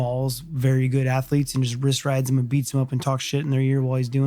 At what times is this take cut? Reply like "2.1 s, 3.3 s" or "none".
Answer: none